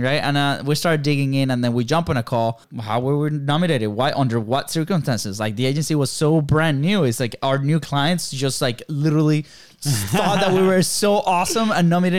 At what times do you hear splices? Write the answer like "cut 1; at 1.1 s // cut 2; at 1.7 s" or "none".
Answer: cut 1; at 2.7 s